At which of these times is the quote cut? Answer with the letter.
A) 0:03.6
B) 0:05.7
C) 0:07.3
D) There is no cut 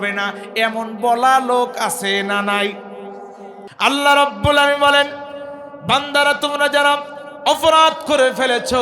A